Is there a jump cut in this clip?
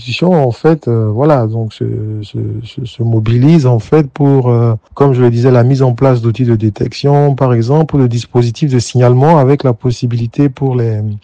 no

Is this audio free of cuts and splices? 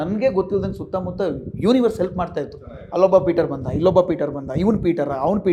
yes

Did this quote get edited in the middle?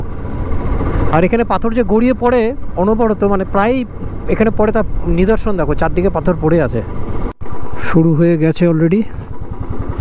no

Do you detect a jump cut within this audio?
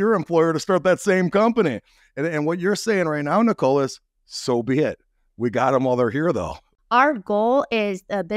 yes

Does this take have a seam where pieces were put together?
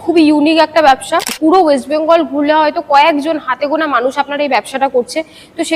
yes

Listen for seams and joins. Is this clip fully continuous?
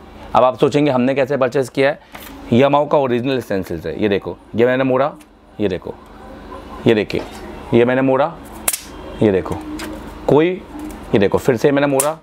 no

